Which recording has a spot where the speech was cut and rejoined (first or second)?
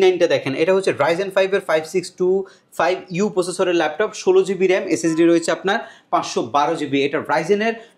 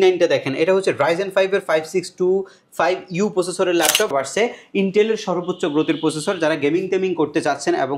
second